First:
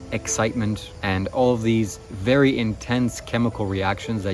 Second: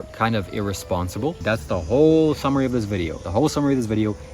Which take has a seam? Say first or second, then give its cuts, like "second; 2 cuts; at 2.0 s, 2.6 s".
second; 2 cuts; at 1.4 s, 3.2 s